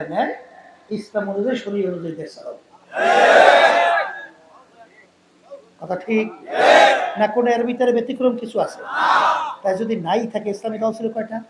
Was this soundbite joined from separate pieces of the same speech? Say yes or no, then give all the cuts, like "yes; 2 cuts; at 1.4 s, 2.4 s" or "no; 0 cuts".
no; 0 cuts